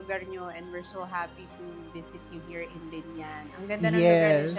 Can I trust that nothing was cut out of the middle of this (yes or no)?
yes